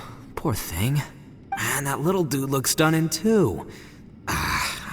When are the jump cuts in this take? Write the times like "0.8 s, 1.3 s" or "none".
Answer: 1.6 s